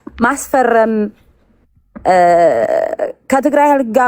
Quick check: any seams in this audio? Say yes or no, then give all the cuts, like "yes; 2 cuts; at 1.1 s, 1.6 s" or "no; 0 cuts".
no; 0 cuts